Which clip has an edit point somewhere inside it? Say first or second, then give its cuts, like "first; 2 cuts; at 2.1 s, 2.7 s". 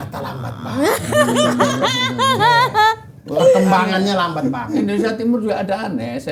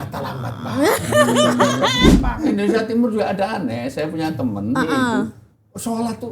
second; 1 cut; at 2.2 s